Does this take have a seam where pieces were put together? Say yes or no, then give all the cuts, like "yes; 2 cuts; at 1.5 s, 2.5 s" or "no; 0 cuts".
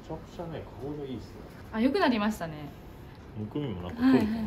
yes; 1 cut; at 1.6 s